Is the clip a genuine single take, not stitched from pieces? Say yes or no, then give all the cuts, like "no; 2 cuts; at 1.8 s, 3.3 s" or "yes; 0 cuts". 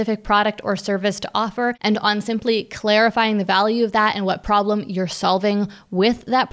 no; 1 cut; at 1.8 s